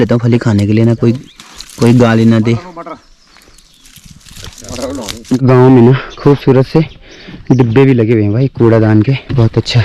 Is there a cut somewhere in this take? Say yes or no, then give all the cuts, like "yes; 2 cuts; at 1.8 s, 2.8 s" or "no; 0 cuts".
yes; 1 cut; at 5.4 s